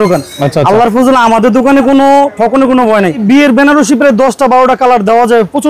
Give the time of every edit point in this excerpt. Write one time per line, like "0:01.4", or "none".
0:03.2